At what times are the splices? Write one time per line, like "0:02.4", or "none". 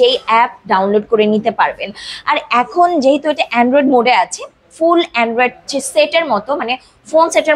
none